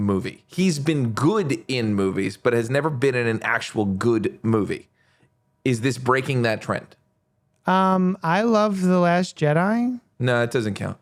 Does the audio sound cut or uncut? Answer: uncut